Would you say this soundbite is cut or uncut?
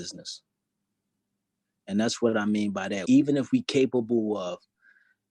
cut